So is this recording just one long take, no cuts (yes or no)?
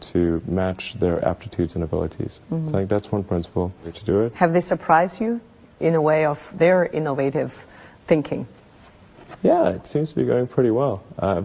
no